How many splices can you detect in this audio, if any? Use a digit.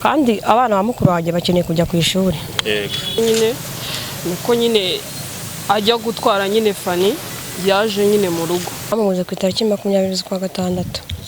2